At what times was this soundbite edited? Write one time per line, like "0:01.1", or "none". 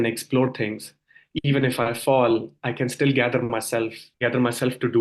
0:04.0